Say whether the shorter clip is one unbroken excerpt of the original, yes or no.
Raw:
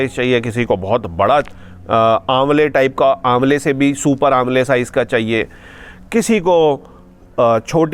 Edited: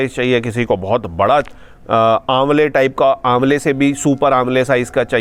yes